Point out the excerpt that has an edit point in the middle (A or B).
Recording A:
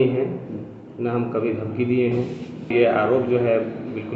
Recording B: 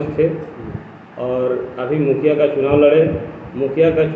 A